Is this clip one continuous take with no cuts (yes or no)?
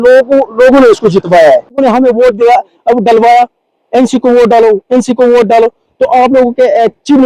no